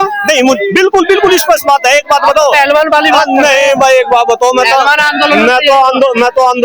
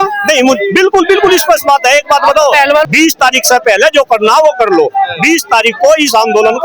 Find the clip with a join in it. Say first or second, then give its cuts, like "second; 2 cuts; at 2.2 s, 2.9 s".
second; 1 cut; at 2.9 s